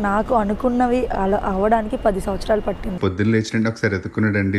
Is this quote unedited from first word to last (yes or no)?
no